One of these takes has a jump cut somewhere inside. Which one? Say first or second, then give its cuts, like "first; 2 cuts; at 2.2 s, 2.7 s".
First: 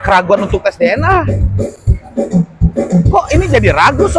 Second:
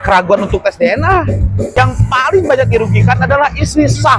second; 1 cut; at 1.7 s